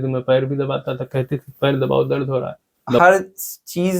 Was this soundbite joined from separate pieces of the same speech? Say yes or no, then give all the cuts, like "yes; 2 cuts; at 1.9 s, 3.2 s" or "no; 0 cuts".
yes; 1 cut; at 3.0 s